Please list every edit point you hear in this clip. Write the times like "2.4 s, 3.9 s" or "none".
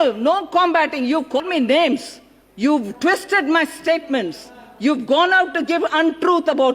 1.4 s